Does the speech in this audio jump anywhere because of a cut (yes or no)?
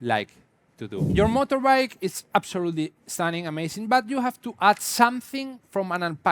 yes